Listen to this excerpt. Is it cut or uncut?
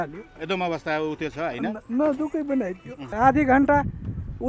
cut